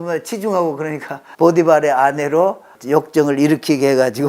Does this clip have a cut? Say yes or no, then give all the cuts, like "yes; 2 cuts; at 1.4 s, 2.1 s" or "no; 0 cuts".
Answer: yes; 2 cuts; at 1.2 s, 2.7 s